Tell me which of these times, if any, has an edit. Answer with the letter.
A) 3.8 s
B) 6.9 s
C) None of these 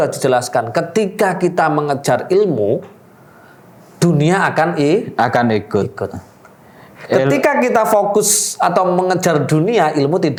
C